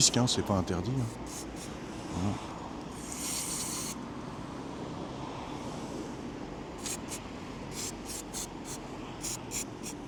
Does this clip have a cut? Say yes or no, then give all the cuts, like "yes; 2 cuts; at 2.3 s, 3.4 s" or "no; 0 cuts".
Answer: no; 0 cuts